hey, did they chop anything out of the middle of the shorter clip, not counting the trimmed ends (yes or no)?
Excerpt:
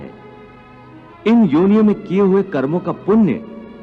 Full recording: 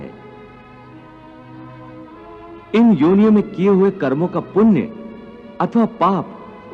yes